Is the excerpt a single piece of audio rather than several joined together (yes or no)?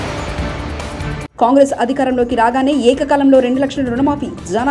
no